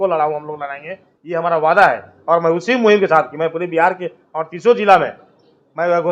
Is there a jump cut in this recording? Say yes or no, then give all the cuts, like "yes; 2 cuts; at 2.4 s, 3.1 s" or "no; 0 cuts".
no; 0 cuts